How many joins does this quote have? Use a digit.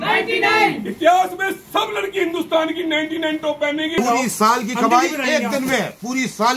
1